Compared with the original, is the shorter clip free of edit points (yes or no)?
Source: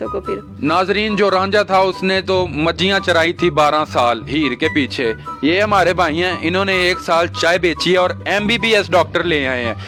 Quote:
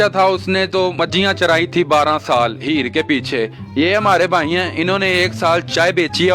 no